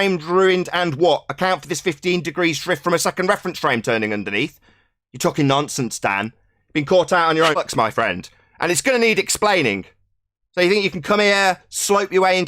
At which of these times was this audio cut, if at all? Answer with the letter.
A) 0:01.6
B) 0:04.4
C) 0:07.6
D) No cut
C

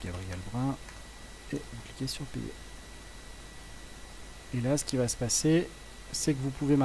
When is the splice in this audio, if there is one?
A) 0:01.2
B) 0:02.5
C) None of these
C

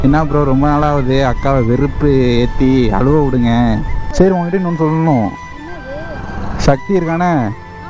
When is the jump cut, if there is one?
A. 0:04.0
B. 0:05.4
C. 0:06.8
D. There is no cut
A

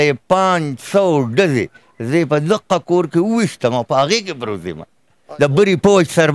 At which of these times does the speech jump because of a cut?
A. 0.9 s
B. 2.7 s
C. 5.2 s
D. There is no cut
C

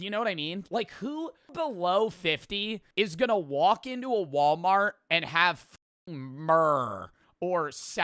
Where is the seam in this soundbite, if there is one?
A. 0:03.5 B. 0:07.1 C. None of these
A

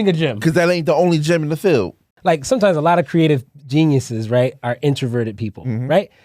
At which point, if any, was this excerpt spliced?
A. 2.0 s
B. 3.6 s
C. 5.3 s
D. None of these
A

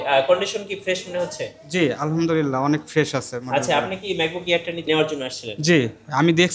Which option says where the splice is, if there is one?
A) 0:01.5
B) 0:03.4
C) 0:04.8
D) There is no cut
C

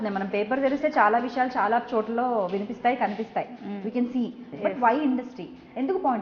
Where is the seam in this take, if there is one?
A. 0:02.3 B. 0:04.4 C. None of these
B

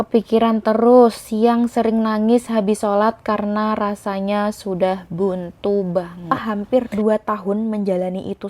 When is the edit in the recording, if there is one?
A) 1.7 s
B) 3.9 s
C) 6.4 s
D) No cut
C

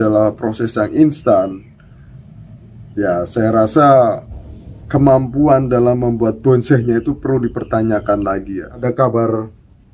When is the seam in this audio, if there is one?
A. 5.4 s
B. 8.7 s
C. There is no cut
B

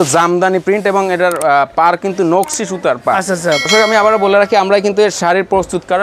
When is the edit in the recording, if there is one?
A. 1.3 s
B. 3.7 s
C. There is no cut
B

